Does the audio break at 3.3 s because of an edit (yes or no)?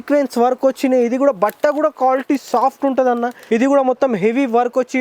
yes